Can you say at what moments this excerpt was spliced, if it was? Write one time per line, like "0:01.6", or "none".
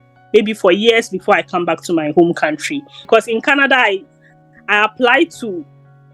0:03.0